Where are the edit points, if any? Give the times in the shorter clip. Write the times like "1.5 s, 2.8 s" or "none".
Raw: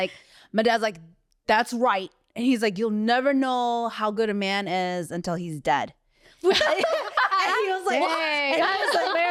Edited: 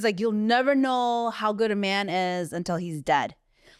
none